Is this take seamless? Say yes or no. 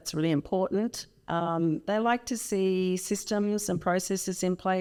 yes